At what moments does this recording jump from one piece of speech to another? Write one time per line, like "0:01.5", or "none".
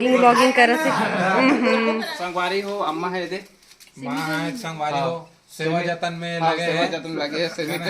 0:02.1